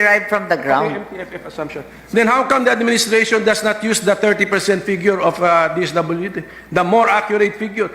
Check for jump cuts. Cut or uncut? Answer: uncut